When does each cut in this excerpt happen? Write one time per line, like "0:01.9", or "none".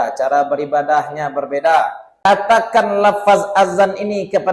0:02.0